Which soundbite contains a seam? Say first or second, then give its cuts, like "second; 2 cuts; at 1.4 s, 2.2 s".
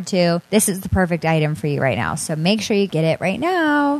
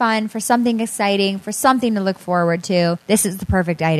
first; 1 cut; at 2.9 s